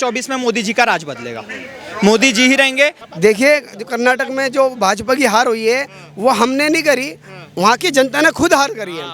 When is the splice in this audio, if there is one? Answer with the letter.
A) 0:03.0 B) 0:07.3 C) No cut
A